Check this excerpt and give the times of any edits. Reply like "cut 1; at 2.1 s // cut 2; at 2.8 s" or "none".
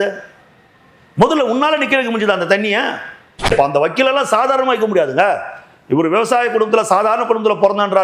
cut 1; at 3.5 s